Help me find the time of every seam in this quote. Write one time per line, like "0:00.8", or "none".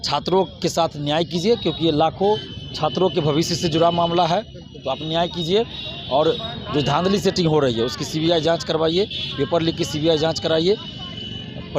none